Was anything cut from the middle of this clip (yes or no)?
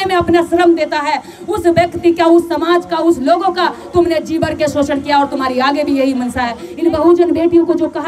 yes